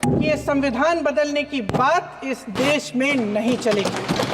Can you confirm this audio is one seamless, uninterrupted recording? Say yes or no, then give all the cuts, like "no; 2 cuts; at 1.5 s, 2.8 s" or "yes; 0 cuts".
yes; 0 cuts